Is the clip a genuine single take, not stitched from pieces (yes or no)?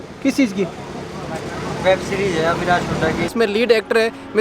no